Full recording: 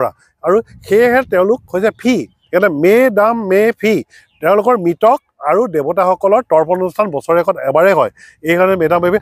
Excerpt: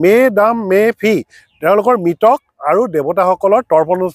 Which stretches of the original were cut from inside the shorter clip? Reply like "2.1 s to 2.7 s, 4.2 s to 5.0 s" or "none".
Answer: none